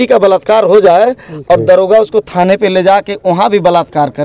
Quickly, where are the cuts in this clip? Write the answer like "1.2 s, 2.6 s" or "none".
none